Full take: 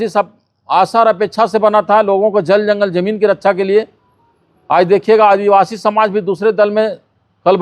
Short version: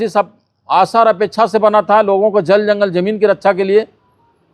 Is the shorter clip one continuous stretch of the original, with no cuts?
yes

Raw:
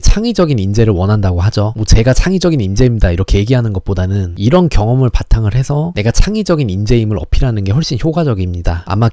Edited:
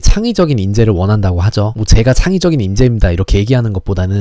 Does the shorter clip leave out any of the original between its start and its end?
no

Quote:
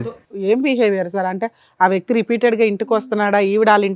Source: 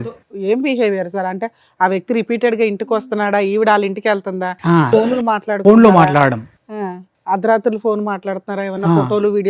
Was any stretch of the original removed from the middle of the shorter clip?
no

